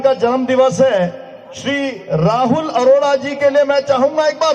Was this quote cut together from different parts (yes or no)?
no